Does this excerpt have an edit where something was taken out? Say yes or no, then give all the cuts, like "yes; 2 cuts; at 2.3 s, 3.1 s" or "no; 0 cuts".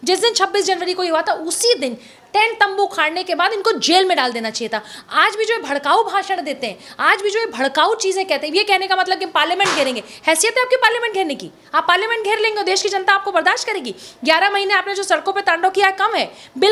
no; 0 cuts